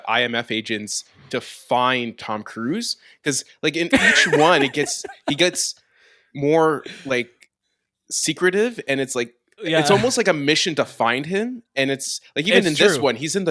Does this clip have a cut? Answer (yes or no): no